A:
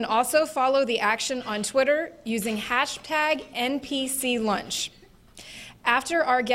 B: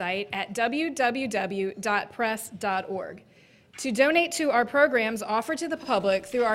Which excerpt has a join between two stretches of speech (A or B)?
A